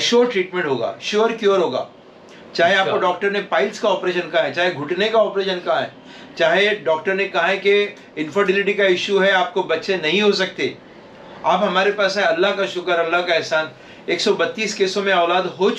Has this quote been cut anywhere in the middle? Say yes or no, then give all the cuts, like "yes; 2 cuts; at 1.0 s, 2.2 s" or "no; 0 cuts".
no; 0 cuts